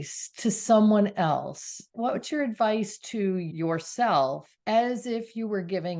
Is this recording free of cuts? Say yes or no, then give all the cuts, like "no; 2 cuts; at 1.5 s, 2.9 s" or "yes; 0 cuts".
no; 3 cuts; at 1.9 s, 3.5 s, 4.5 s